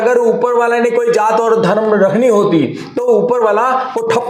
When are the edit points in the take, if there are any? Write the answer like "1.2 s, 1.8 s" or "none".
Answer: none